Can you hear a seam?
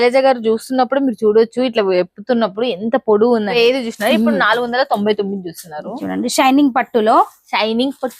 yes; 1 cut; at 3.6 s

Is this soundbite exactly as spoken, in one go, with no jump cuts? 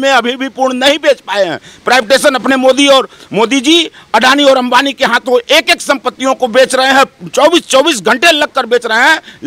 yes; 0 cuts

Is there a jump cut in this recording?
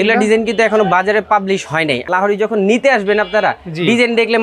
yes; 1 cut; at 2.0 s

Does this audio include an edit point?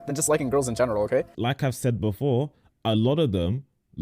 yes; 1 cut; at 1.3 s

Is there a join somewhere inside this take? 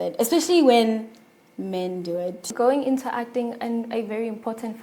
yes; 1 cut; at 2.5 s

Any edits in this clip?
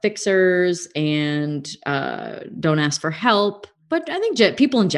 yes; 1 cut; at 3.8 s

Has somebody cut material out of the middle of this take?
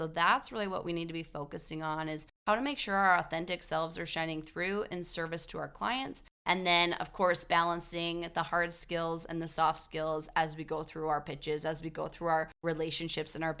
no; 0 cuts

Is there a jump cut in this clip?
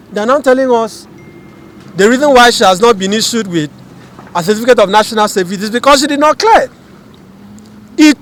no; 0 cuts

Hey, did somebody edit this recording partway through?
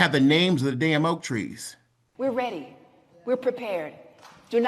yes; 1 cut; at 2.1 s

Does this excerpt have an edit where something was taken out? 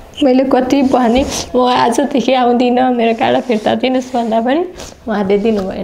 no; 0 cuts

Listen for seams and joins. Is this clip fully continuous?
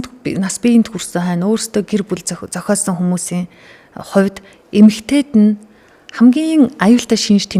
yes; 0 cuts

